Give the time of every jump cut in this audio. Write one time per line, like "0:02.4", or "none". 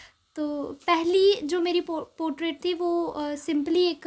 none

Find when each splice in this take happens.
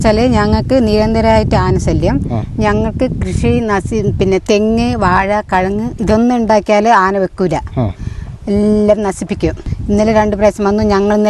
0:09.7

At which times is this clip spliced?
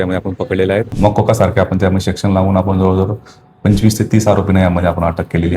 0:00.9

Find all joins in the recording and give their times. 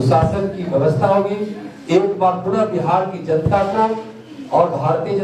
none

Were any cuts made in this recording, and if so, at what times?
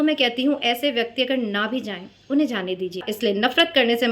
0:03.1

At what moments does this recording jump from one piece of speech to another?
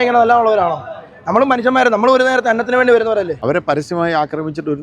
0:03.4

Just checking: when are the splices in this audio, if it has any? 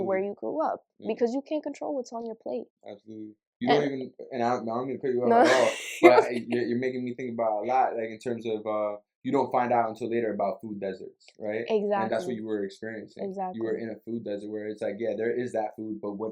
none

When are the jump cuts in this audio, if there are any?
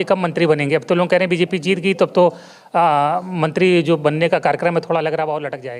none

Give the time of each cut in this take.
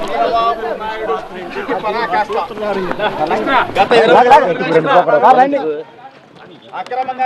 0:01.4

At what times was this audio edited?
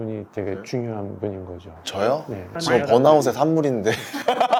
none

